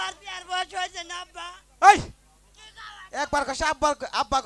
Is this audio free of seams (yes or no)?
yes